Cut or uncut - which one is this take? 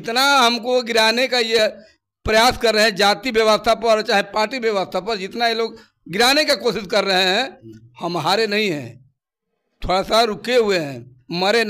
uncut